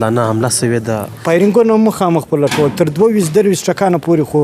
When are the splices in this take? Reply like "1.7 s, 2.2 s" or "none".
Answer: 1.2 s